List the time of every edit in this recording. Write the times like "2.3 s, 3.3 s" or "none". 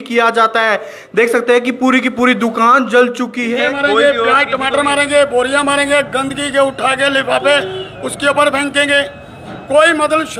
3.6 s